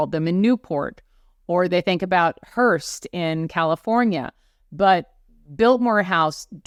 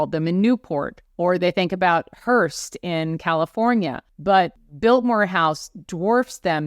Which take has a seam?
second; 2 cuts; at 1.0 s, 4.4 s

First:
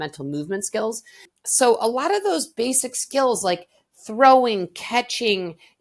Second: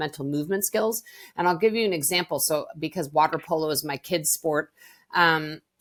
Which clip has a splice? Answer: first; 1 cut; at 1.3 s

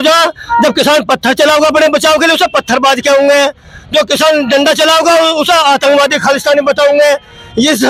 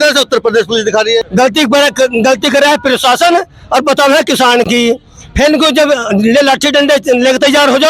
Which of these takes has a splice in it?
second; 1 cut; at 1.3 s

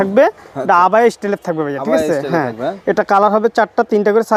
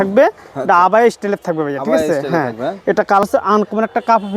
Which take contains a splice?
second; 1 cut; at 3.2 s

